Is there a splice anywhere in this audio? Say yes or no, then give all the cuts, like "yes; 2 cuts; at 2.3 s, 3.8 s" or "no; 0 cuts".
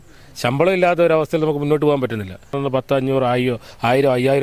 yes; 1 cut; at 2.6 s